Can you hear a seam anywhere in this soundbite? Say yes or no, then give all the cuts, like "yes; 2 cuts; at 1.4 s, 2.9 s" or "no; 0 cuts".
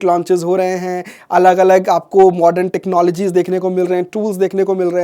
no; 0 cuts